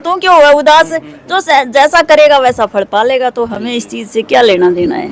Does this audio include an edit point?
no; 0 cuts

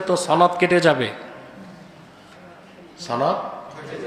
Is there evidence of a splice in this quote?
no; 0 cuts

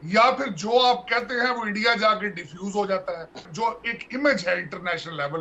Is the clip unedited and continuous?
no; 1 cut; at 3.5 s

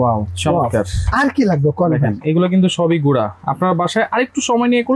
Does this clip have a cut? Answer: no; 0 cuts

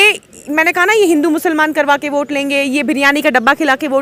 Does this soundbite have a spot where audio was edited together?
no; 0 cuts

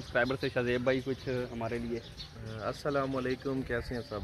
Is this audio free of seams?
yes; 0 cuts

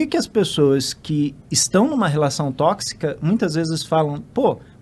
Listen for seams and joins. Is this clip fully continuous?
yes; 0 cuts

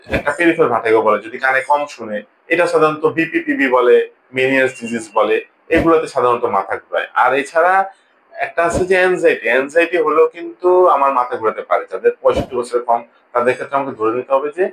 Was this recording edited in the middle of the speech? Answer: no; 0 cuts

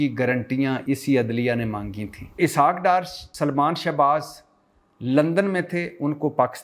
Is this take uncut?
no; 3 cuts; at 0.8 s, 2.4 s, 3.2 s

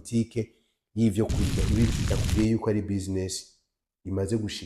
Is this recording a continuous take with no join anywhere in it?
no; 1 cut; at 1.9 s

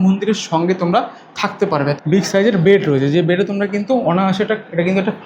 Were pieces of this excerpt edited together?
yes; 1 cut; at 1.9 s

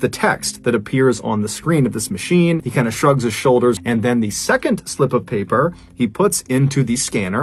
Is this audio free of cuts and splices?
yes; 0 cuts

